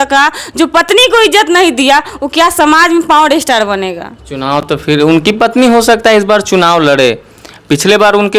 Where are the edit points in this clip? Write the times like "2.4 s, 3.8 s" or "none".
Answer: none

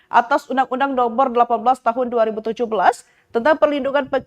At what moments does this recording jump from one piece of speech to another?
2.7 s

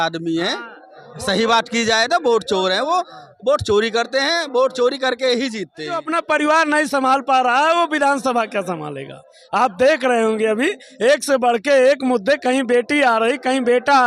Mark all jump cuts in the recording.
6.0 s

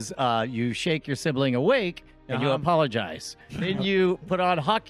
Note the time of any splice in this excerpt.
3.6 s

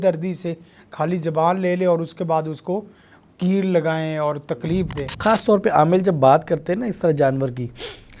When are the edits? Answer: 5.1 s

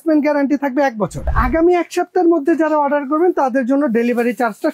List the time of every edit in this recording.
1.2 s

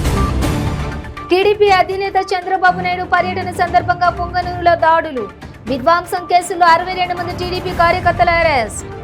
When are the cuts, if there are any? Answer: 1.1 s

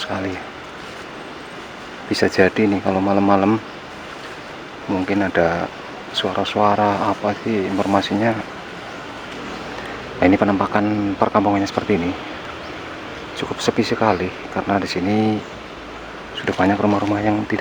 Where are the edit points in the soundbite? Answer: 9.3 s

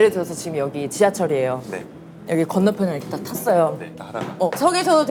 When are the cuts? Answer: none

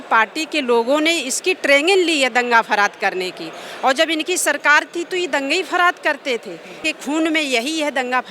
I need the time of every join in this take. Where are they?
6.8 s

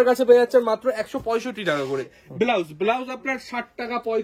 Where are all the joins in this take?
2.2 s

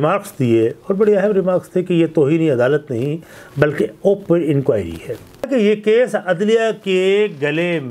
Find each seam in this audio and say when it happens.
5.5 s

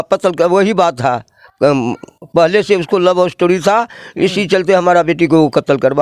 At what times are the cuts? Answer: none

